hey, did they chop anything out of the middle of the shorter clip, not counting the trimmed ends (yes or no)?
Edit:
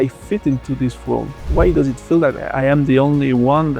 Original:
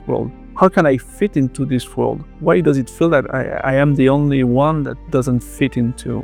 yes